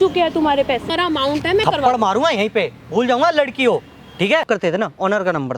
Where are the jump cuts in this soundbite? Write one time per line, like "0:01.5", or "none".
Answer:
0:00.9
0:04.5